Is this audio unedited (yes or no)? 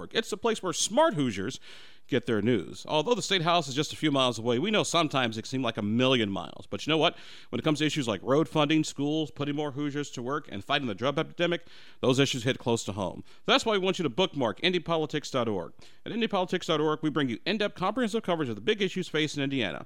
yes